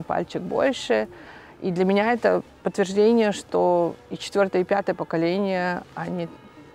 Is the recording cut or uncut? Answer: uncut